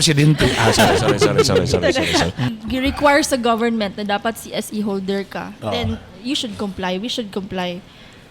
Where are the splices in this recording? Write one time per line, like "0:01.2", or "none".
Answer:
0:02.4